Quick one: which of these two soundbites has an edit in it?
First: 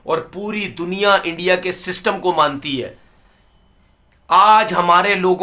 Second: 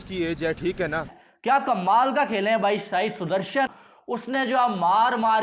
second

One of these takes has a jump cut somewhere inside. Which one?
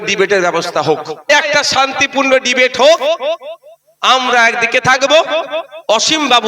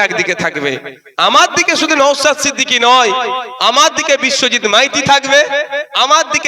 first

